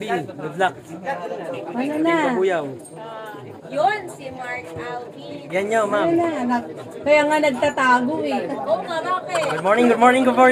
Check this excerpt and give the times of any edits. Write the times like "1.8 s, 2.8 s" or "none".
none